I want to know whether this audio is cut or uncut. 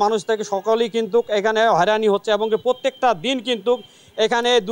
uncut